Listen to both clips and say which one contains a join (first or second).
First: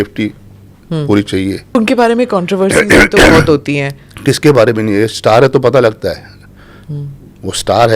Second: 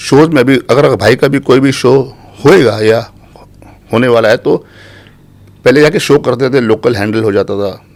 first